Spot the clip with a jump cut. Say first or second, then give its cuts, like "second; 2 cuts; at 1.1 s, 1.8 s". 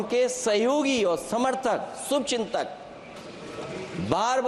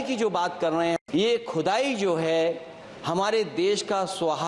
second; 1 cut; at 1.0 s